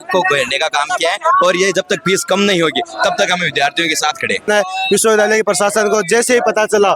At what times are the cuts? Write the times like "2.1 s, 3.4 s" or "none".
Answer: 4.5 s

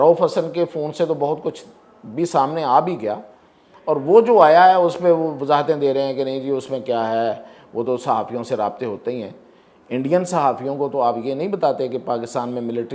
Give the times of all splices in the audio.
none

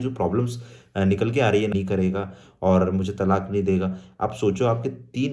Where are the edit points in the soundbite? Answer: 1.7 s

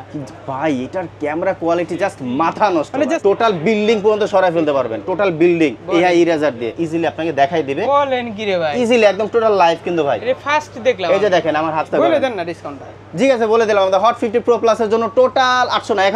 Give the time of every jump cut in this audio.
3.2 s, 6.7 s, 11.9 s

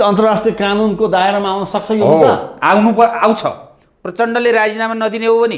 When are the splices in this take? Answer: none

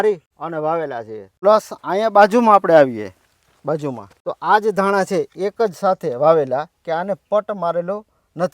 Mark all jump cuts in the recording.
0.9 s, 4.1 s

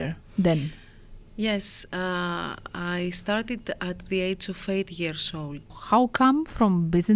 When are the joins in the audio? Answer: 5.8 s

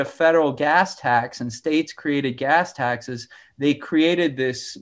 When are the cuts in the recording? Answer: none

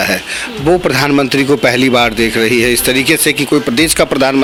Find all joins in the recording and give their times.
none

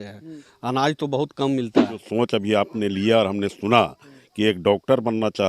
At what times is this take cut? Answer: 2.0 s

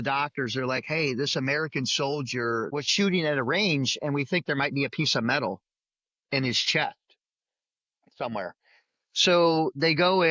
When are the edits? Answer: 2.7 s

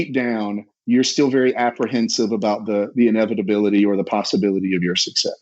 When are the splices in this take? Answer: none

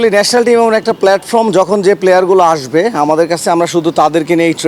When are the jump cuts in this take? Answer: none

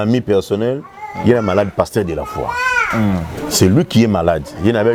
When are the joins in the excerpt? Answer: none

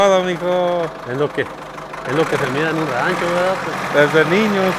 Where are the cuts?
3.7 s

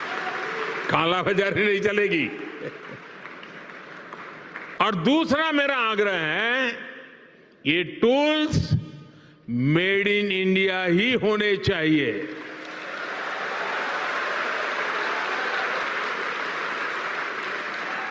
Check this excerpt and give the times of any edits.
4.8 s, 15.8 s

